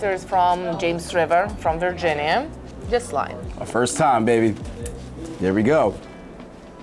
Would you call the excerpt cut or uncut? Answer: cut